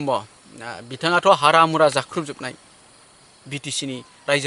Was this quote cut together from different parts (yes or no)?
no